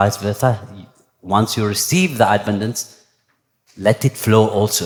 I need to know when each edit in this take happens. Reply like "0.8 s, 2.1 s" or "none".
none